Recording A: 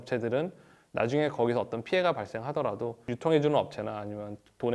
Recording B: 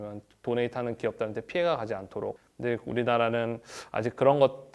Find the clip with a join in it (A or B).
B